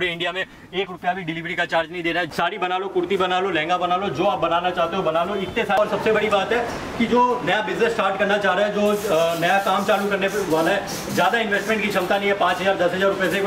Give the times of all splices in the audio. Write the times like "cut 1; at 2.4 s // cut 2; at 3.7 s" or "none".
cut 1; at 2.3 s // cut 2; at 5.8 s